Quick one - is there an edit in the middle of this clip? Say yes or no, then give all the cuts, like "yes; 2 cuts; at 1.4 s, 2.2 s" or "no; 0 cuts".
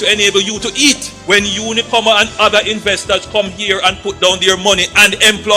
no; 0 cuts